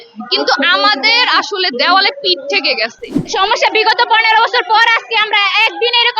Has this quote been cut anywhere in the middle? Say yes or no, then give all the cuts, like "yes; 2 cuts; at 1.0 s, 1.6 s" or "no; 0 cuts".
yes; 1 cut; at 3.3 s